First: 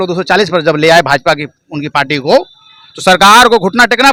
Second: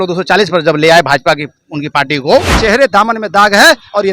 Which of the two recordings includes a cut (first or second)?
second